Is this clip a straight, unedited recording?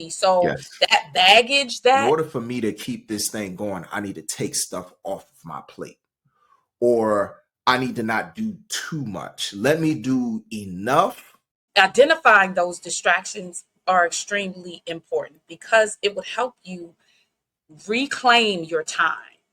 no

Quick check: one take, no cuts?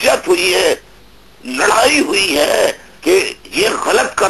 no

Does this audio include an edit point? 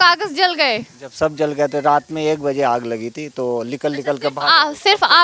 no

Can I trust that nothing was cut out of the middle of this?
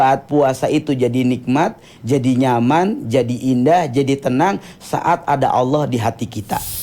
yes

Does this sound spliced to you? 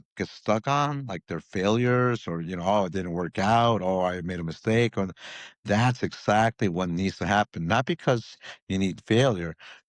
no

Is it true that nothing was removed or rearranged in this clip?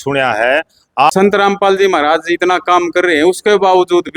yes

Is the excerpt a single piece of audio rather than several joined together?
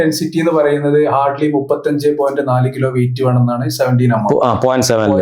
yes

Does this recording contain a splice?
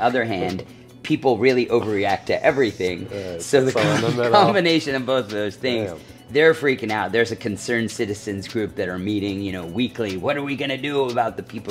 no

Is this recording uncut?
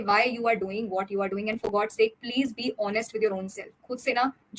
yes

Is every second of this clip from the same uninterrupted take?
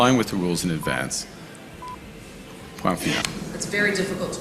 no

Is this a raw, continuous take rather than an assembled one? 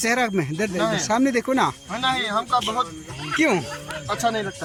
yes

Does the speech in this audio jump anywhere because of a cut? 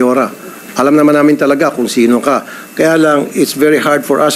no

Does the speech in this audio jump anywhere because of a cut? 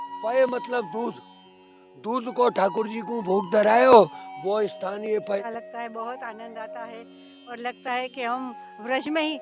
yes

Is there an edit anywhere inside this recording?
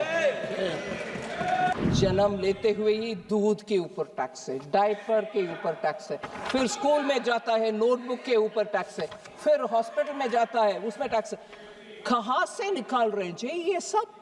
yes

